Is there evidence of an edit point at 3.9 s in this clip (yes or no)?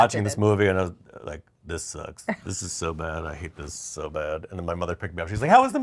no